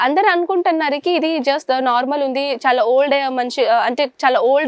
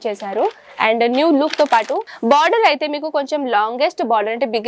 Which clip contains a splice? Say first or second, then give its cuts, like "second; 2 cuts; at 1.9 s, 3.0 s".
second; 1 cut; at 2.1 s